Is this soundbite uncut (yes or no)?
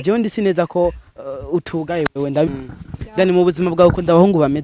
no